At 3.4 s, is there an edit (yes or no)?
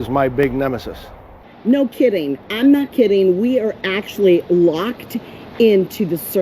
no